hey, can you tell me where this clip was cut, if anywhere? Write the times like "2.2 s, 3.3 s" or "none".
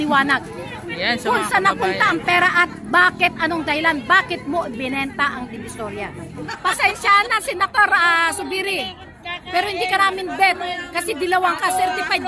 6.5 s